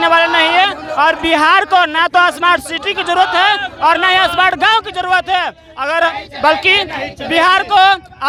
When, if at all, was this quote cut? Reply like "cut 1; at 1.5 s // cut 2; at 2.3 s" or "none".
none